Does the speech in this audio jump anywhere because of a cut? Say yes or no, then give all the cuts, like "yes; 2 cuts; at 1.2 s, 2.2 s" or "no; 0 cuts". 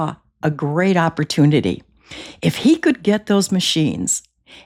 no; 0 cuts